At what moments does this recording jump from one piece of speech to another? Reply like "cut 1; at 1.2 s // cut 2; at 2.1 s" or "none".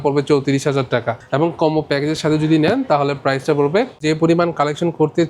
cut 1; at 1.2 s // cut 2; at 4.0 s